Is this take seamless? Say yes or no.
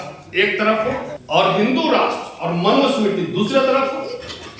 no